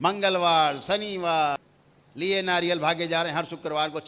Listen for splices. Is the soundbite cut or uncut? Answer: cut